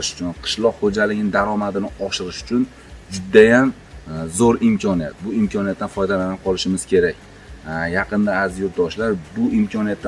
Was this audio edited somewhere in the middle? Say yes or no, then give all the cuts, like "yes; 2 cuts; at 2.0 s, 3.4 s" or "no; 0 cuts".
no; 0 cuts